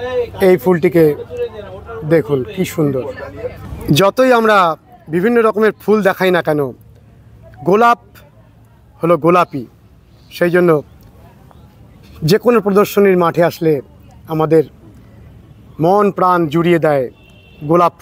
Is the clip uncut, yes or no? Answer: no